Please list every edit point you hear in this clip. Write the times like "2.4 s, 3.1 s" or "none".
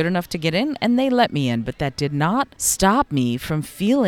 2.6 s